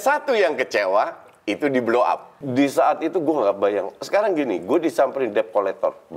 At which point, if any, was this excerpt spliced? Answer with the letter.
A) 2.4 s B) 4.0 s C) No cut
A